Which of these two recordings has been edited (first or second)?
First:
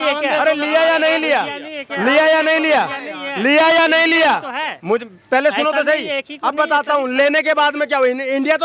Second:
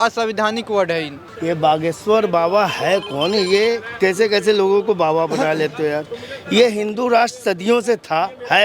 second